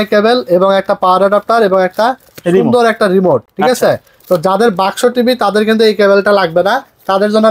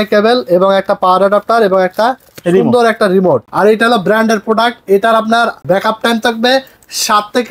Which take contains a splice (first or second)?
second